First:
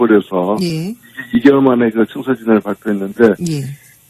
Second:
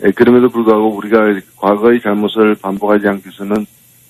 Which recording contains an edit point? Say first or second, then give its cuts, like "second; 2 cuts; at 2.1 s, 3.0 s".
first; 1 cut; at 3.1 s